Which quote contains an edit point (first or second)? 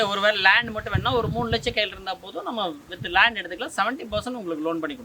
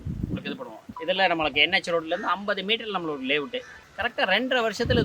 second